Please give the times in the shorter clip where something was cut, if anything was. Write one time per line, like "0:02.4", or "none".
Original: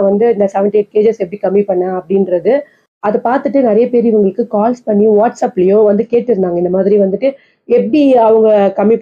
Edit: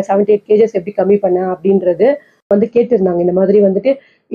0:02.5